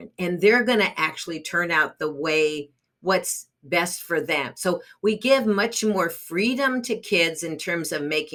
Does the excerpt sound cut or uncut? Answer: uncut